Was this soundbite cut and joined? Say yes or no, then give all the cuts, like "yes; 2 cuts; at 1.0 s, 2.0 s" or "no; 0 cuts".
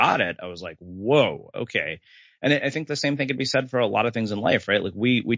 no; 0 cuts